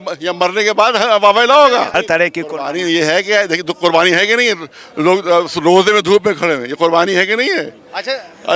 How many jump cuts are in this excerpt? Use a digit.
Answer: 1